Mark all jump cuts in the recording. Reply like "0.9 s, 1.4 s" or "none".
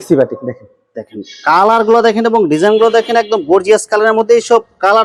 none